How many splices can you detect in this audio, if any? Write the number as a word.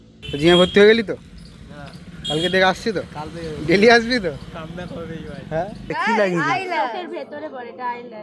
one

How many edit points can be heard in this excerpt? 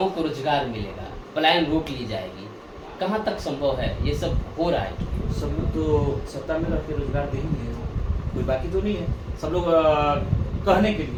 zero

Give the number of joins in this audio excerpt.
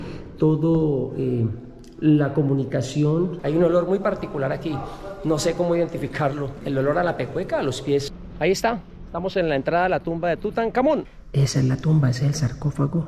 four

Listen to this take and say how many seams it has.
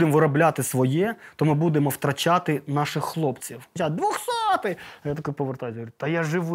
one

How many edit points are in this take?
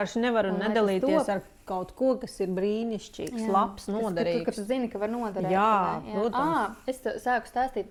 zero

